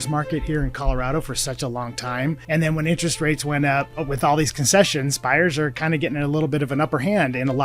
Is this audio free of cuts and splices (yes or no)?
no